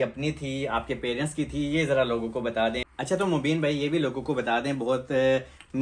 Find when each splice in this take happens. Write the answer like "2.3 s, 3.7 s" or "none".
2.9 s